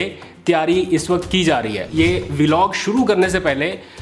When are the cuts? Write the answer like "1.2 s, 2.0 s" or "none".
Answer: 1.8 s